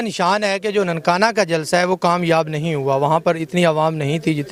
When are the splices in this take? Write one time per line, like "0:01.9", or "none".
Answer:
none